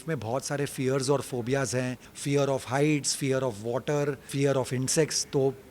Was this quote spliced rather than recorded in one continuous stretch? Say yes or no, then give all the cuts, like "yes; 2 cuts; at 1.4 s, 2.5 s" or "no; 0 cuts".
yes; 2 cuts; at 2.1 s, 4.2 s